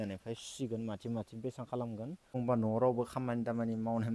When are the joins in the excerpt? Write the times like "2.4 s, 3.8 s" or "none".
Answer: 2.3 s